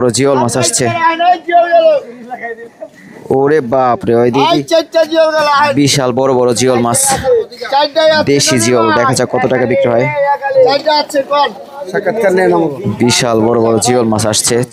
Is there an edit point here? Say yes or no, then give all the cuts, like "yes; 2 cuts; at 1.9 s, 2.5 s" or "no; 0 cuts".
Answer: no; 0 cuts